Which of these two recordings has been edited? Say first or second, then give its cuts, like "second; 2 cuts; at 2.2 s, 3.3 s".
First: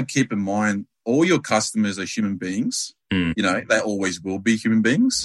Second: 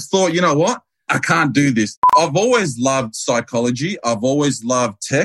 second; 2 cuts; at 1.1 s, 2.1 s